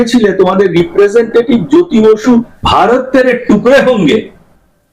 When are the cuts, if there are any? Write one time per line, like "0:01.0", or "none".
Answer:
0:02.6

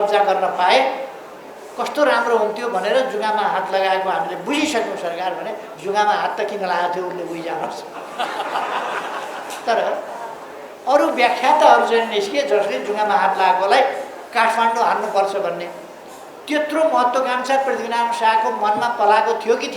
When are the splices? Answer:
none

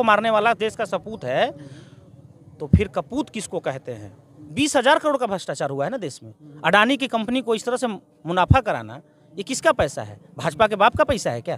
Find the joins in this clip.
0:04.4

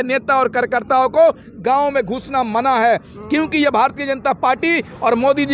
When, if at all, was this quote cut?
none

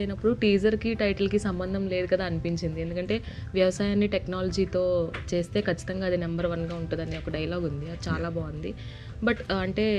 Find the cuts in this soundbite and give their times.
none

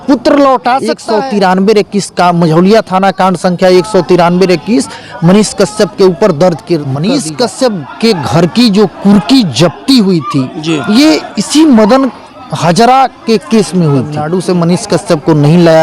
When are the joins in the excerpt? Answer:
0:01.0
0:06.9
0:14.2

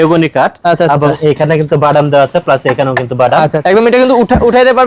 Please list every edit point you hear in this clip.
0:03.6

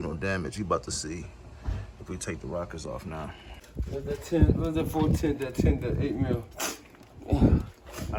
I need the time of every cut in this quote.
none

